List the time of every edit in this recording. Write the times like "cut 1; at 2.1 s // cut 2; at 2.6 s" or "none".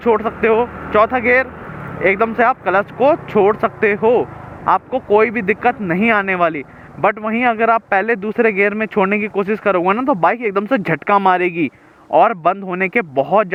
none